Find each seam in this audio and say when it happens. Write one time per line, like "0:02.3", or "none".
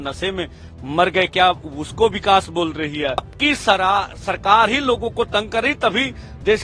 0:03.3